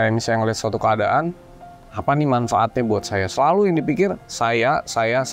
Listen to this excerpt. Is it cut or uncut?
uncut